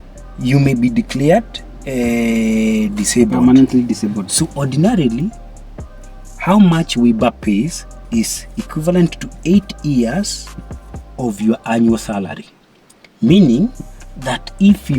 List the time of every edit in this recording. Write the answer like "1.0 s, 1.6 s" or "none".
4.3 s